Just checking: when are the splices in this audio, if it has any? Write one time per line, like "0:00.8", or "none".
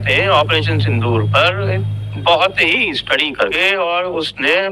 0:03.5